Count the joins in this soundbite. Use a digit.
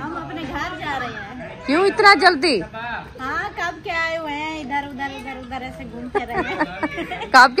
0